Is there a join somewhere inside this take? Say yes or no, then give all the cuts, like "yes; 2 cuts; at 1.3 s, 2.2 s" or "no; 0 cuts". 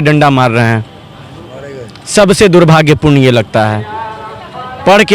no; 0 cuts